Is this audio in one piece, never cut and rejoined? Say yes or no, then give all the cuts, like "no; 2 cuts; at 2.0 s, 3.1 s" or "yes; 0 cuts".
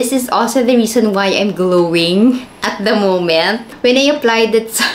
no; 1 cut; at 3.6 s